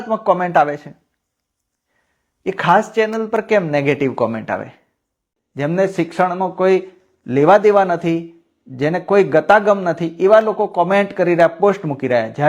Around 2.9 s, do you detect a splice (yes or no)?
no